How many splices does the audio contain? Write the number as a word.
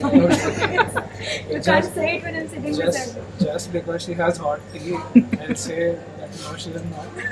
zero